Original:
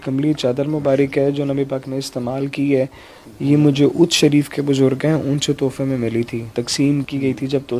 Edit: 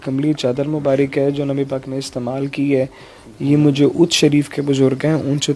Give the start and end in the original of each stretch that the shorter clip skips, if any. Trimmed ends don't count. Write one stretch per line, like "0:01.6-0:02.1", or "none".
none